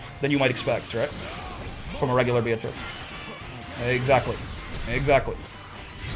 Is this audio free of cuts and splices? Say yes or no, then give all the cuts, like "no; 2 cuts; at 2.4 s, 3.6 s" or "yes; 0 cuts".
yes; 0 cuts